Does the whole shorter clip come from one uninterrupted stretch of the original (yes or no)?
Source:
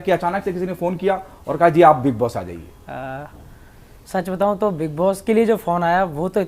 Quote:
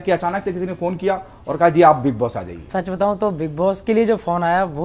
no